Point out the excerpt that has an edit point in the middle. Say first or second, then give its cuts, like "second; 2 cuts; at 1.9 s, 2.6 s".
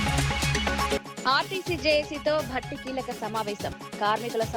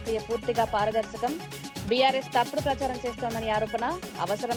first; 1 cut; at 1.0 s